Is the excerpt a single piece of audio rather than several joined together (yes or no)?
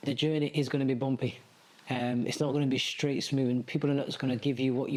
yes